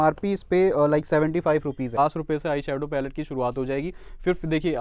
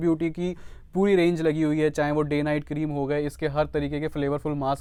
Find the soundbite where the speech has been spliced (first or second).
first